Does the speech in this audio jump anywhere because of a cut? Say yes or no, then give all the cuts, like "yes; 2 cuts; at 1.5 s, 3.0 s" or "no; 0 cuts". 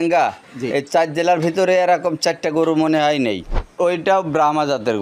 yes; 1 cut; at 3.7 s